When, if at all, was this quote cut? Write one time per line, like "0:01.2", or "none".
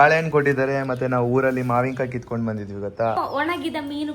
0:03.2